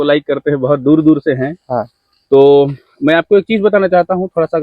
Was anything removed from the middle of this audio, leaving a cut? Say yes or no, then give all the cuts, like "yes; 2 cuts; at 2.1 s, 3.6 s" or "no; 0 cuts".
no; 0 cuts